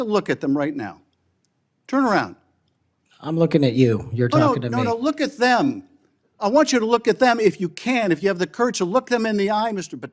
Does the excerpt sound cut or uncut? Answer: uncut